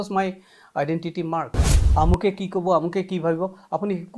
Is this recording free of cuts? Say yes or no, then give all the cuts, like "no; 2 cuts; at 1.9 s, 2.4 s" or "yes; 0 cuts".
no; 1 cut; at 1.8 s